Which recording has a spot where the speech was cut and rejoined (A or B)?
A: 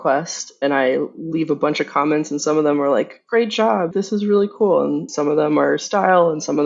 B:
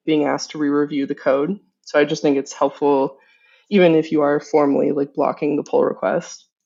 A